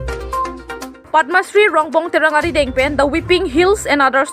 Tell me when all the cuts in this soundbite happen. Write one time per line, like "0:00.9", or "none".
0:01.0